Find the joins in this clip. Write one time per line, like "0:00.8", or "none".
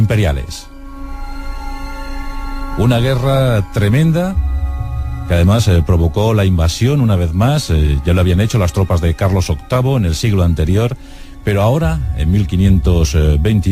0:07.9